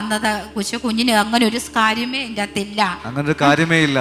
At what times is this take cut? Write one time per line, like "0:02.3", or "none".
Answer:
none

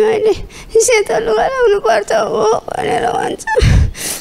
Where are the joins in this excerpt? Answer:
none

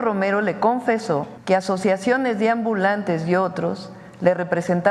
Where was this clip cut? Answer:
0:01.3

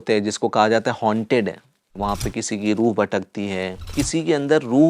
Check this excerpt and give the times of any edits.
0:01.9
0:03.9

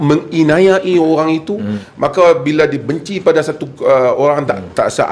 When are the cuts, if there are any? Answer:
0:01.8

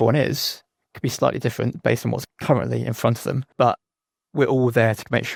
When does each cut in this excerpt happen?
none

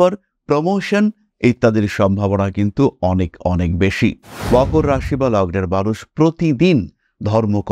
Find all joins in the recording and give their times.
0:04.3

